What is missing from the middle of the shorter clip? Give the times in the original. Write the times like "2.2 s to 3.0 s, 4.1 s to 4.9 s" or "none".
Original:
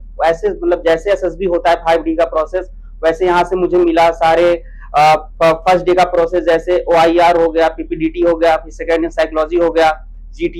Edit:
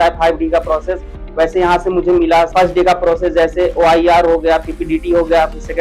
4.2 s to 5.6 s